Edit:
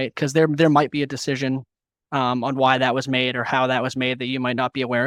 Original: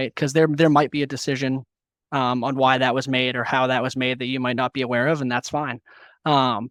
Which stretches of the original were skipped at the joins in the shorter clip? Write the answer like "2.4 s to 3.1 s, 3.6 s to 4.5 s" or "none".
none